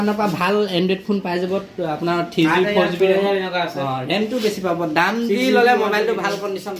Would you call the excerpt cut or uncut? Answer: uncut